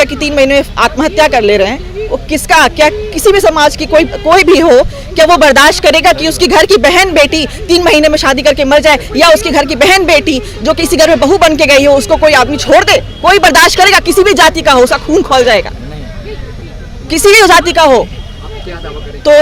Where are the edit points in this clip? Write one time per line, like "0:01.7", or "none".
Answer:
none